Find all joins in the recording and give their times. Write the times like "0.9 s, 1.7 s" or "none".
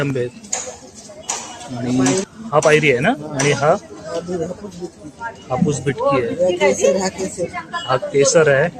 2.2 s